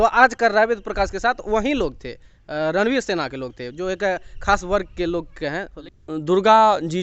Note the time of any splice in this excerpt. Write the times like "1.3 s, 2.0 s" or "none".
5.7 s